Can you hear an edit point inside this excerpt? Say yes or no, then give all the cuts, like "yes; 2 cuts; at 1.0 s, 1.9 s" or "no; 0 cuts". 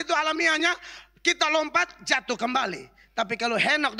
no; 0 cuts